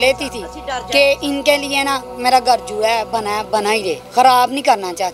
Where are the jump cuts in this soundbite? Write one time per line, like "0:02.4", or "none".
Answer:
0:04.0